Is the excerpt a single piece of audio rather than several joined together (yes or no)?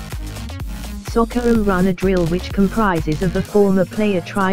no